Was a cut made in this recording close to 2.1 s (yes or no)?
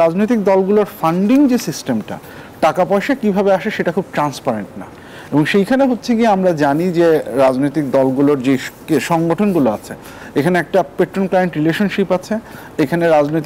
no